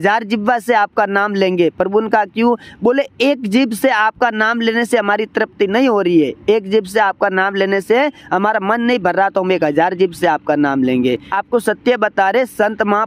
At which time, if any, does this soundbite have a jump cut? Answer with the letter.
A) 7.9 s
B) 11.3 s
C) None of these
B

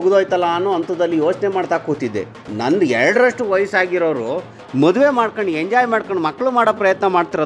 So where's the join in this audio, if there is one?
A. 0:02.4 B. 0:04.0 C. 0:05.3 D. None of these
A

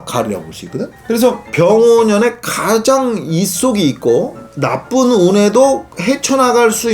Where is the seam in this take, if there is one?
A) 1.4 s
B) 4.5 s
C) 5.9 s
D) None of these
A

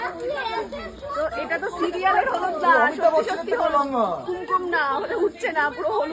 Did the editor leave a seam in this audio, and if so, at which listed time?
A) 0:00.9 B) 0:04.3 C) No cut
C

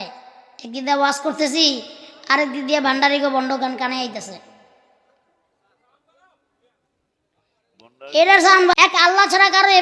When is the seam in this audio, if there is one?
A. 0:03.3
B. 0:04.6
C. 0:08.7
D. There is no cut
C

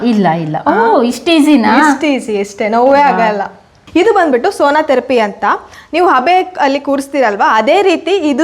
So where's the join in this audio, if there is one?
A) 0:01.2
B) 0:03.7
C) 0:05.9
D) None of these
B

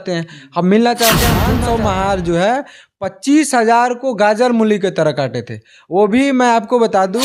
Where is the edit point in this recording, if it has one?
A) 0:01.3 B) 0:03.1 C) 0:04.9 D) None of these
A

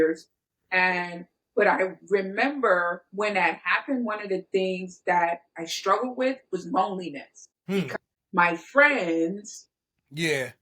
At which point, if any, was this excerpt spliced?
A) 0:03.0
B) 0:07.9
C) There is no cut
B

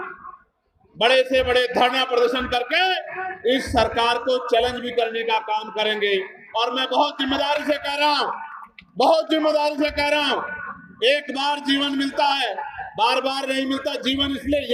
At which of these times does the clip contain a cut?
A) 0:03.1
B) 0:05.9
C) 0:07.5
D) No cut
D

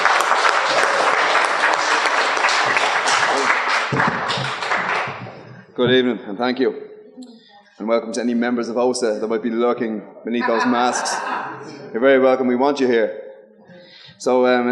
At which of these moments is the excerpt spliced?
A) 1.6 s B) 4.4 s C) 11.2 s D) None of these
B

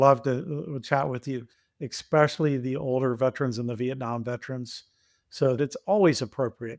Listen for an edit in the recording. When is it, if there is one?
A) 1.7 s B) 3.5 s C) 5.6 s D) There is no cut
C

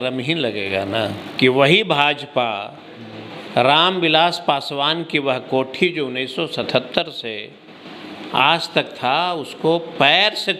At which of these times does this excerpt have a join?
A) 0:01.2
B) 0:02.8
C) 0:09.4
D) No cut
A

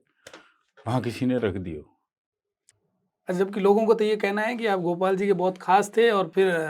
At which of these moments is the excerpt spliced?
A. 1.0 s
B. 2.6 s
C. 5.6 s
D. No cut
B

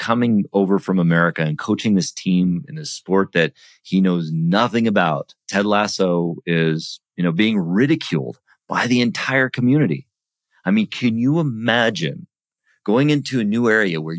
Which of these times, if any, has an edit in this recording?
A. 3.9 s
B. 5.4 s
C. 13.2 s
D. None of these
B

